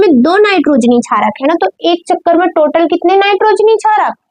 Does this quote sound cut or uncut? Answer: uncut